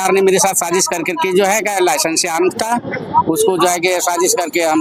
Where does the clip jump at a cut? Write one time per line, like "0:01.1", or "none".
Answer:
none